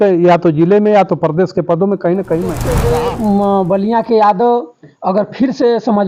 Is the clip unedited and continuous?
no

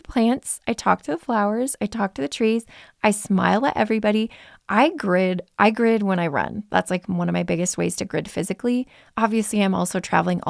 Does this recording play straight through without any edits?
yes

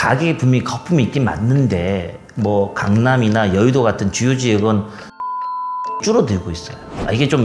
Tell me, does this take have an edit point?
no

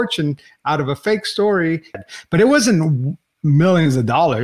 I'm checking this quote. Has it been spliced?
yes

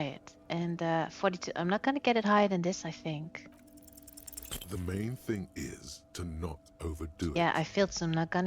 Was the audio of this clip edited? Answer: yes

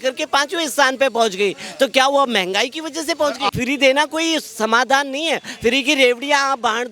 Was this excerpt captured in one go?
no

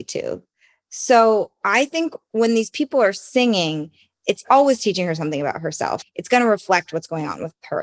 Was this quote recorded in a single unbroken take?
no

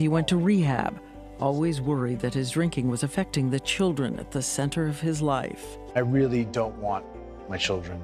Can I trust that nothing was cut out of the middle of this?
yes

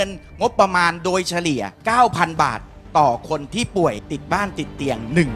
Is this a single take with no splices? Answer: no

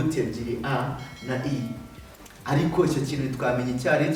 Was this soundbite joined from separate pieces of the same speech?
no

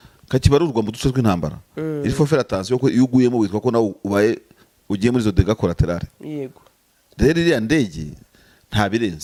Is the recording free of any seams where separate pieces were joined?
yes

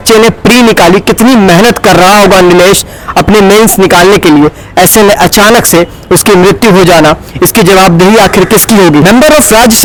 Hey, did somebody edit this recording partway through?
no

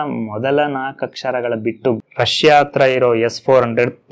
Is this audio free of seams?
no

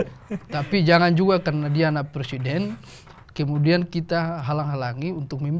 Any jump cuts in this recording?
no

